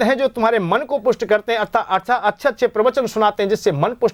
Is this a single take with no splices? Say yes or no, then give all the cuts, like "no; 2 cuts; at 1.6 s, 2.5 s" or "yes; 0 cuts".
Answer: yes; 0 cuts